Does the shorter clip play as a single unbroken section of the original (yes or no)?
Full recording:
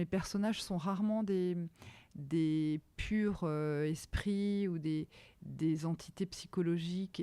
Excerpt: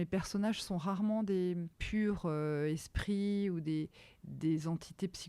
no